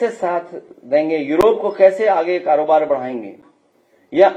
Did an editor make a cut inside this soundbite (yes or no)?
no